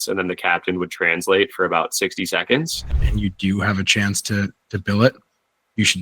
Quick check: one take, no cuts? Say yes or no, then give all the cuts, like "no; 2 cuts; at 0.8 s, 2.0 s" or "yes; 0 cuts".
no; 1 cut; at 3.0 s